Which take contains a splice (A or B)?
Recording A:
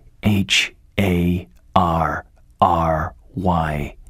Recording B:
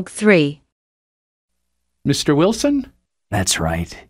B